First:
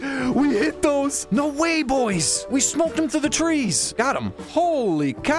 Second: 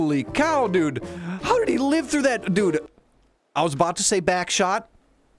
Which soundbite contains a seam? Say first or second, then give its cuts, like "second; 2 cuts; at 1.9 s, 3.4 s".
first; 3 cuts; at 1.2 s, 2.3 s, 3.8 s